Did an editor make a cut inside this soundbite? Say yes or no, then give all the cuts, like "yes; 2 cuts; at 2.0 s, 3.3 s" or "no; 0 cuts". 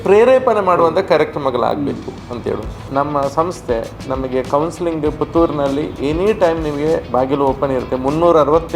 yes; 1 cut; at 2.8 s